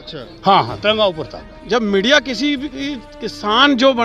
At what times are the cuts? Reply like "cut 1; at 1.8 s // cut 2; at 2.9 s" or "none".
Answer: cut 1; at 1.5 s